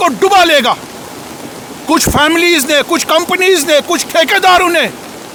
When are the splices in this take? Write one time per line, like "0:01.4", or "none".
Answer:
none